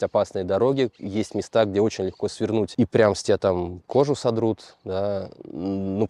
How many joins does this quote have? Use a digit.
0